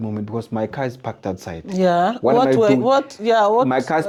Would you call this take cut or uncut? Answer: uncut